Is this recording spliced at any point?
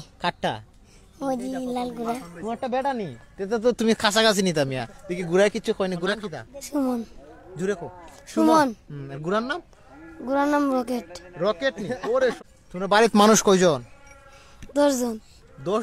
yes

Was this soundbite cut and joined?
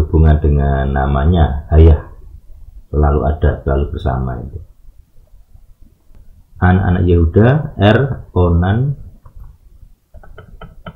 yes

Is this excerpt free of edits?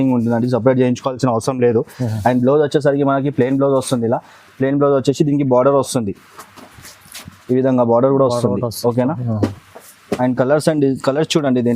yes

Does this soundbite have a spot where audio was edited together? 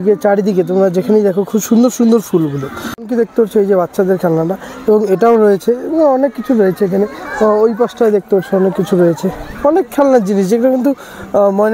yes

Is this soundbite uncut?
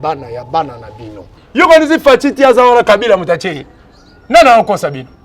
no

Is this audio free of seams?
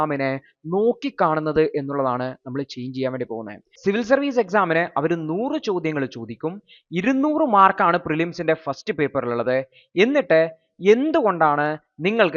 no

